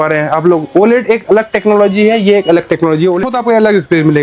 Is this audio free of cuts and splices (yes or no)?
no